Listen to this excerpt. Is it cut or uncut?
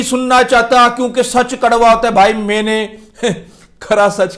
uncut